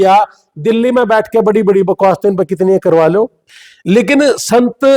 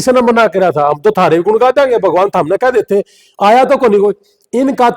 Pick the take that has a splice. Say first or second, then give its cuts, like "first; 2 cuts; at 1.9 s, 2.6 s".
first; 1 cut; at 3.4 s